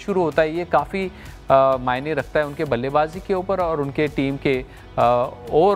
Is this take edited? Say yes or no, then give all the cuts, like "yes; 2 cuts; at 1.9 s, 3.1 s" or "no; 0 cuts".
no; 0 cuts